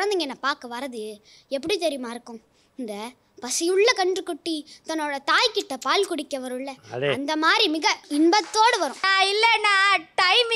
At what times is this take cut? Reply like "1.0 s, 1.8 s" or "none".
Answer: 9.0 s